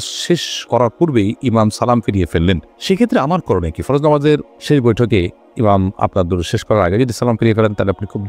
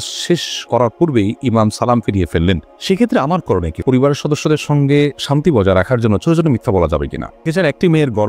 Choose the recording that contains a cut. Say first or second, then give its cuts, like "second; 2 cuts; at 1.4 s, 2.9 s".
second; 2 cuts; at 3.8 s, 7.5 s